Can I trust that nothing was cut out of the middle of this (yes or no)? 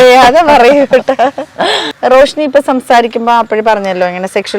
no